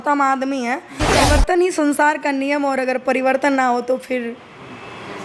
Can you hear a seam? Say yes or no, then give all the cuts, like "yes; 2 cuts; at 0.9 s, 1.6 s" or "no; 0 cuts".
yes; 1 cut; at 1.2 s